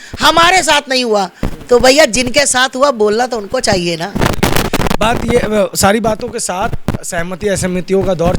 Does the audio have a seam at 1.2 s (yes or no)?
no